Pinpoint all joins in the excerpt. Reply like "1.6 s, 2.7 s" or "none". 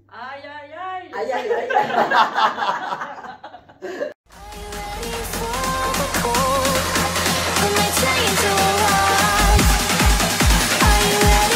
none